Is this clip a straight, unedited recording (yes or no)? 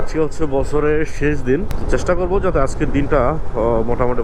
yes